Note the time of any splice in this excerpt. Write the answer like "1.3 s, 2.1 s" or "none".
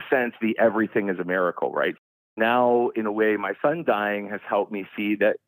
2.2 s